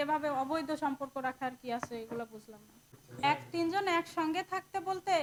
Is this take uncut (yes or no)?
yes